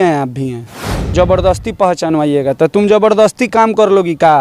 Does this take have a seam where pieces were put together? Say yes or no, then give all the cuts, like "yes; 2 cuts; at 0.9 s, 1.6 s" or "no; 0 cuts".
yes; 1 cut; at 1.1 s